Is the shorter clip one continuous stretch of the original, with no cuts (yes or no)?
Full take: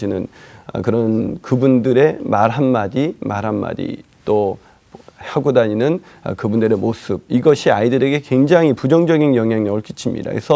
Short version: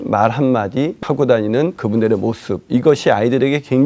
no